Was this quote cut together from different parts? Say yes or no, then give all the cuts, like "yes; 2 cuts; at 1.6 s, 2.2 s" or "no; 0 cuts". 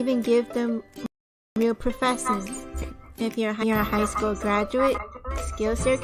no; 0 cuts